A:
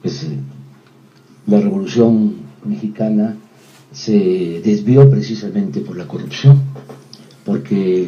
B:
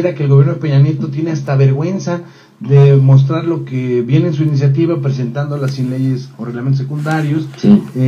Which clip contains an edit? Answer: A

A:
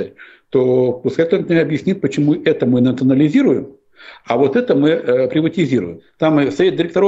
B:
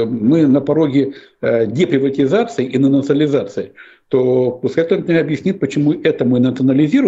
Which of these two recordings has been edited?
A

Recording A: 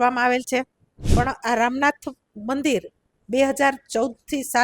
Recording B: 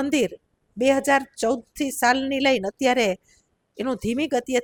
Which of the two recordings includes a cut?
A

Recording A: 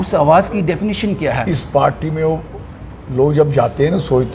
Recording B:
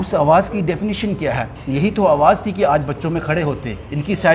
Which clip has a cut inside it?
A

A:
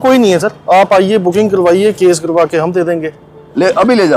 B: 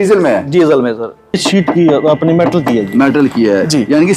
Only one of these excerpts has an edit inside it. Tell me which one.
B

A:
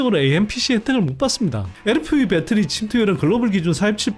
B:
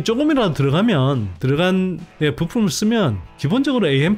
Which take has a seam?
A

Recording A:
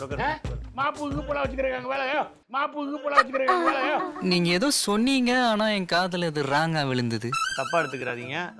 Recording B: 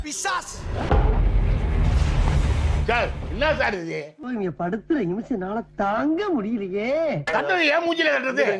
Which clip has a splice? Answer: A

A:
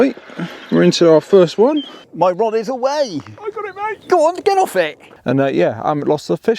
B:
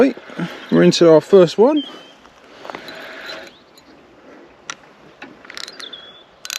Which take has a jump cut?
A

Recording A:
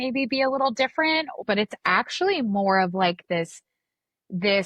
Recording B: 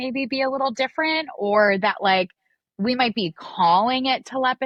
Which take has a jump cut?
A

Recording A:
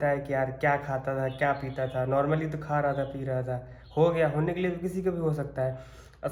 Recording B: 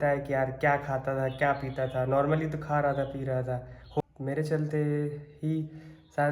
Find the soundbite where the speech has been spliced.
B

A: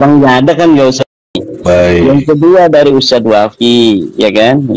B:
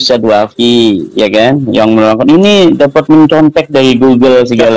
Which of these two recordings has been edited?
A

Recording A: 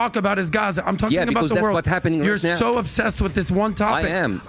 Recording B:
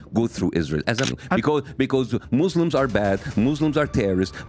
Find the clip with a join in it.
B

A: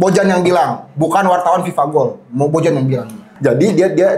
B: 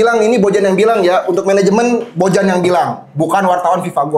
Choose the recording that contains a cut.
A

